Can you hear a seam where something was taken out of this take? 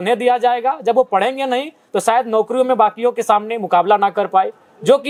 no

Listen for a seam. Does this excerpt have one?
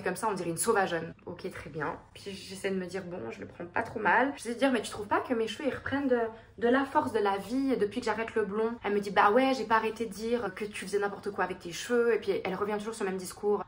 no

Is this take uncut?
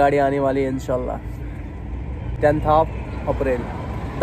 yes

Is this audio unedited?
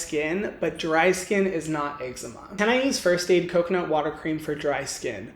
no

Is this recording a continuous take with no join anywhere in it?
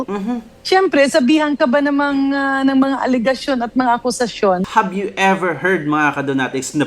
no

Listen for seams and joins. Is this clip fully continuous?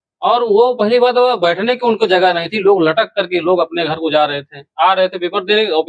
yes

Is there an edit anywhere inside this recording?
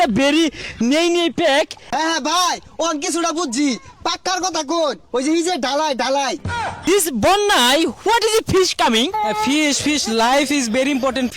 yes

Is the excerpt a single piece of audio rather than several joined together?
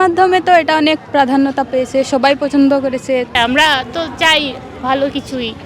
no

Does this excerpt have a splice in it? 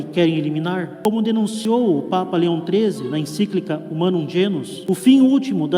yes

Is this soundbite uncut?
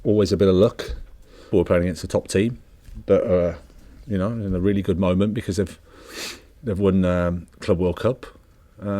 no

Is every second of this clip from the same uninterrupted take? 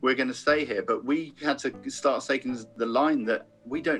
no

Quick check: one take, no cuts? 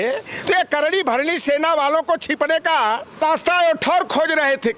no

